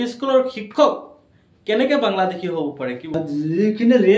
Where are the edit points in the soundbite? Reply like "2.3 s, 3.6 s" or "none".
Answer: 3.1 s